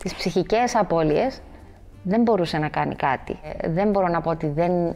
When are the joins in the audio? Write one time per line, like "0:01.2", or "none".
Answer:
0:03.5